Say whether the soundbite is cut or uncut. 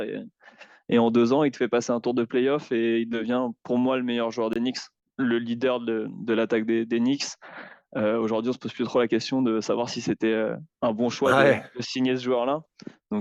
uncut